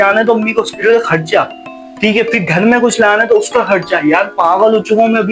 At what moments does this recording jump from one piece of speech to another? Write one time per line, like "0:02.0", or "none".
none